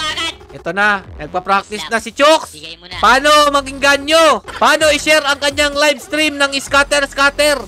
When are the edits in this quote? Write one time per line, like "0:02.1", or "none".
0:04.5